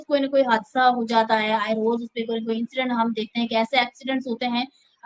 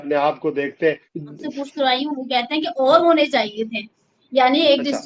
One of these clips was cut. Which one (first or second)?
second